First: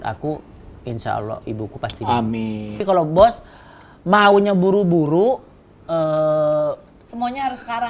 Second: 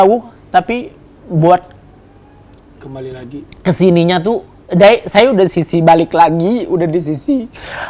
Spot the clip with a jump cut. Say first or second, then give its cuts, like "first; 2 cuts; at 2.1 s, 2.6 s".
first; 1 cut; at 2.8 s